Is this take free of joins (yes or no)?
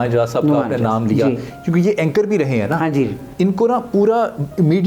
yes